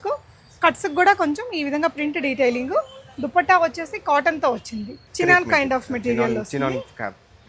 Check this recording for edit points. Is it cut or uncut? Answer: cut